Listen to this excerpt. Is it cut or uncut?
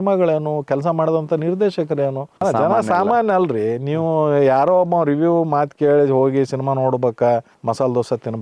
cut